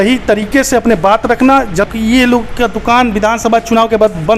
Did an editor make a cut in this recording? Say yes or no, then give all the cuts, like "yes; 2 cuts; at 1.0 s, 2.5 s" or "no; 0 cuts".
yes; 1 cut; at 1.9 s